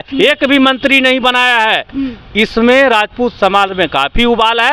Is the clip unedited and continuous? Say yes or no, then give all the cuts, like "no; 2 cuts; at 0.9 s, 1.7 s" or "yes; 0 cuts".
yes; 0 cuts